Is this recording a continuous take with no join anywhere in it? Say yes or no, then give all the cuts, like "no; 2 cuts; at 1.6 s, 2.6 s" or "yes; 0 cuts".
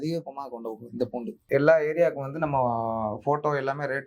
no; 1 cut; at 1.4 s